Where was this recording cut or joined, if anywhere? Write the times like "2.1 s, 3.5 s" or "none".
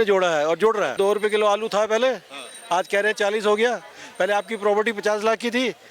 0.9 s